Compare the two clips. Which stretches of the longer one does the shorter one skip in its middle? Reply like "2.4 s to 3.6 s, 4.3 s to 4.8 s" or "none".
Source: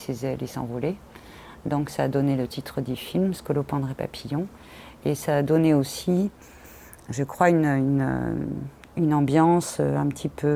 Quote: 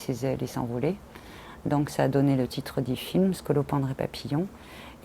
none